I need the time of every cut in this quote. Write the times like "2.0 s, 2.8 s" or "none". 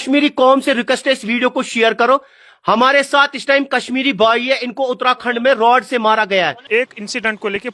6.6 s